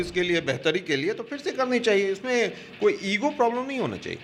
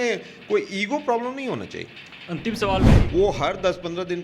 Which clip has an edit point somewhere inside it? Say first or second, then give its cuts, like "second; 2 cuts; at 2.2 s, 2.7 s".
second; 1 cut; at 2.9 s